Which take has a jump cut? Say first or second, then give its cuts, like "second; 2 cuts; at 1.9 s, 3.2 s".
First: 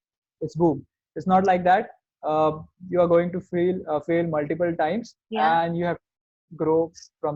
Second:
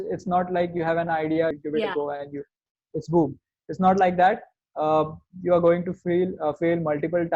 second; 1 cut; at 1.5 s